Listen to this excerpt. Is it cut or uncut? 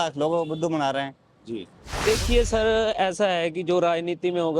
cut